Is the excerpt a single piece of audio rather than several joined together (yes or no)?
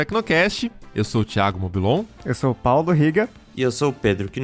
no